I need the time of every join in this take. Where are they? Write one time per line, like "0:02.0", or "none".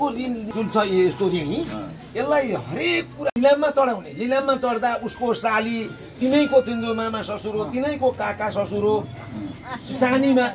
0:03.3